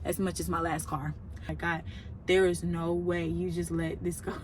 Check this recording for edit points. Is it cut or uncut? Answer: cut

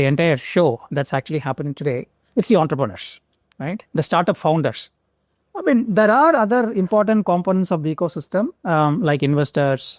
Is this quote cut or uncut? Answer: uncut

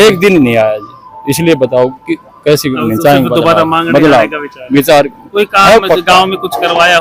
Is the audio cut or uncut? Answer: uncut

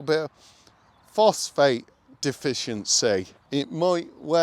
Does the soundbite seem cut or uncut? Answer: cut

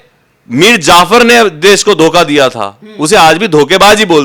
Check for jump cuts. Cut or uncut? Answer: uncut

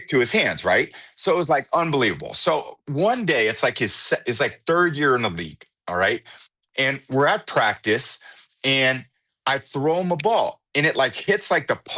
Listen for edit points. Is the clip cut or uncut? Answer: uncut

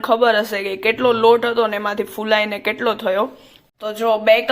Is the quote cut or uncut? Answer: cut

